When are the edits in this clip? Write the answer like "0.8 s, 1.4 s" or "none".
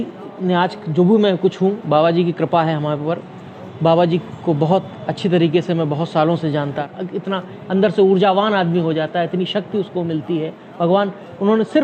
6.9 s